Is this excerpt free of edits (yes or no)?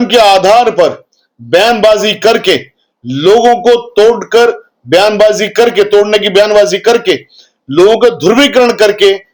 yes